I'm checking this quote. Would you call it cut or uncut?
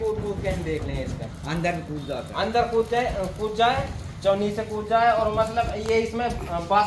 uncut